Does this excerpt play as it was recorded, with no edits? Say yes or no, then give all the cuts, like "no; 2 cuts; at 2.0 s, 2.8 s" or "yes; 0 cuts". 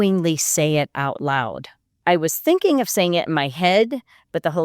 no; 1 cut; at 1.9 s